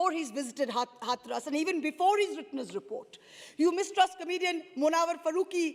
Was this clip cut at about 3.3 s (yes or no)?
no